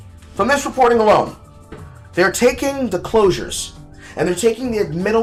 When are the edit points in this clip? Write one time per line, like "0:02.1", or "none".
none